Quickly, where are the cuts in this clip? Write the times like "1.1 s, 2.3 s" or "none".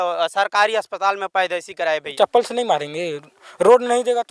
2.1 s